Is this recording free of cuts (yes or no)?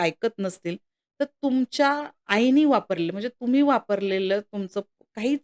yes